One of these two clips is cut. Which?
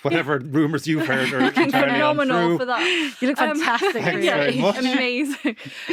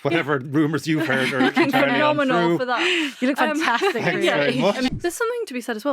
second; 1 cut; at 4.9 s

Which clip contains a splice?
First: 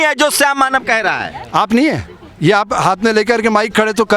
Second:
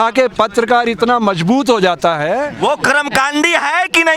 second; 1 cut; at 2.5 s

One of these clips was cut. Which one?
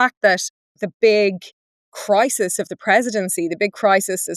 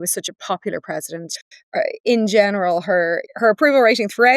second; 1 cut; at 3.3 s

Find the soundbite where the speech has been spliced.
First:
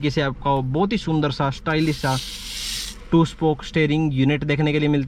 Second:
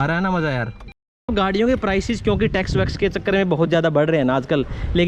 second; 1 cut; at 1.3 s

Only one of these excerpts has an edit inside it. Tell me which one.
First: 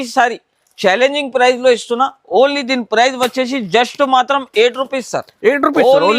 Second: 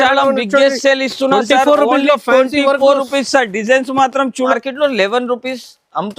second; 1 cut; at 4.5 s

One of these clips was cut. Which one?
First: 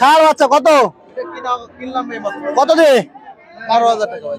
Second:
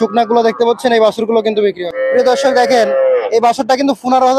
second; 1 cut; at 1.9 s

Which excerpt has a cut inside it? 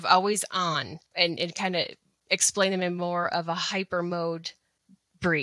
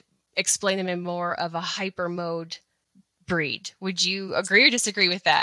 first; 1 cut; at 1.0 s

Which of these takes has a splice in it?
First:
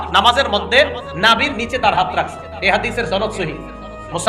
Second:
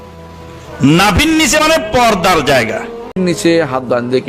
second; 1 cut; at 3.2 s

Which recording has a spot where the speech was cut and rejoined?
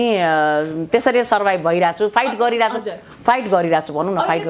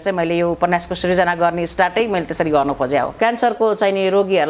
second; 1 cut; at 3.1 s

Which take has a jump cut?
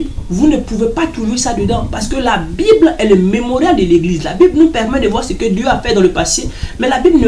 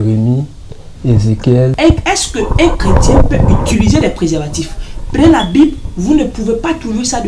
second; 1 cut; at 1.7 s

